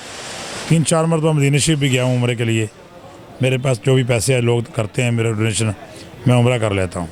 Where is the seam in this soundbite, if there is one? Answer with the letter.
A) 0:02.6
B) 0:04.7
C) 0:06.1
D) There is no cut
D